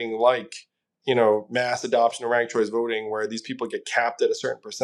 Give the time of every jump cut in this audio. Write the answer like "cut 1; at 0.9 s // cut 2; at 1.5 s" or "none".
none